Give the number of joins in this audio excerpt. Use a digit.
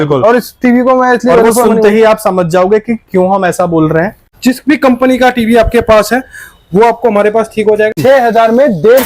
2